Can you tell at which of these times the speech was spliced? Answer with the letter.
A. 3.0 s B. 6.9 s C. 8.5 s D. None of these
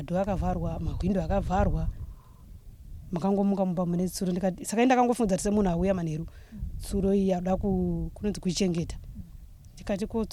D